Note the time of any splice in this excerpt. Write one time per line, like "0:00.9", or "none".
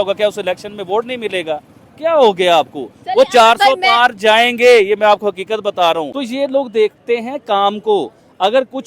0:06.2